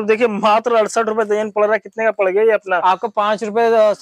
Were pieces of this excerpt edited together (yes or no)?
no